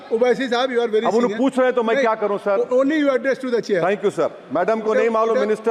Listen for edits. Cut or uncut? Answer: uncut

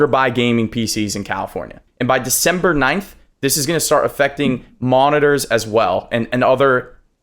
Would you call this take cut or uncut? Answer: cut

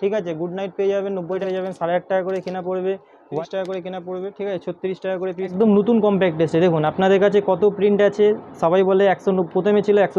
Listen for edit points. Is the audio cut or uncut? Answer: cut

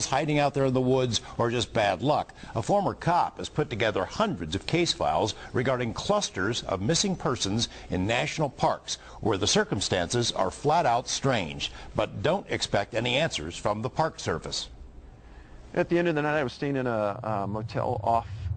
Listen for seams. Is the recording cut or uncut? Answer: cut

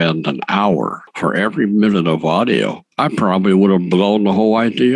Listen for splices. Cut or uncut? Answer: uncut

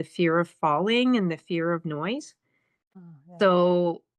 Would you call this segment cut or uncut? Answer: cut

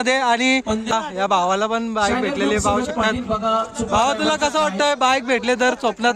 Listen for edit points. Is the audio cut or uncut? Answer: cut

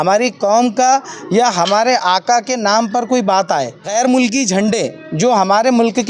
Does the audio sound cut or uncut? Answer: cut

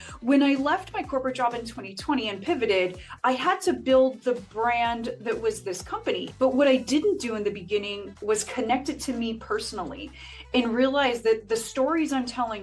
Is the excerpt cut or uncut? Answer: cut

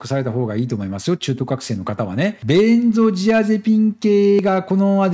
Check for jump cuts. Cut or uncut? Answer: cut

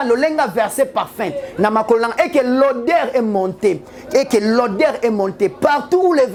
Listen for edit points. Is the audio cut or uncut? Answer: uncut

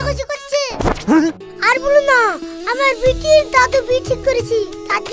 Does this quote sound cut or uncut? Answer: cut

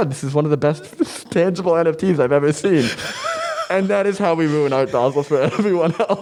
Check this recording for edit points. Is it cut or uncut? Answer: uncut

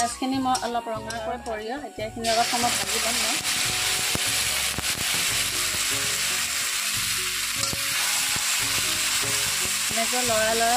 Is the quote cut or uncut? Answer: cut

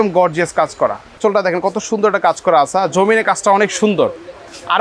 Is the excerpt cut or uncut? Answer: cut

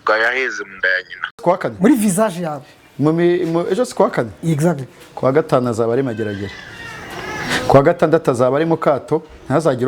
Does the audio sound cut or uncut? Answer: cut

